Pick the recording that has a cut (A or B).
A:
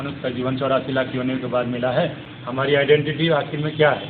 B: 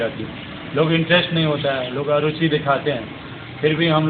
A